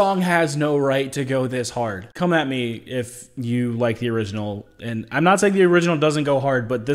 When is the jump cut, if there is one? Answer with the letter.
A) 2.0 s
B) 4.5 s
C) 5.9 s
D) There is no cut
A